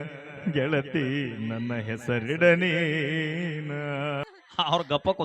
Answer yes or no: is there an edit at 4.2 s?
yes